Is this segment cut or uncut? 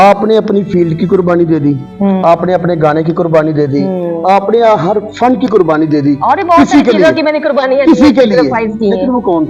uncut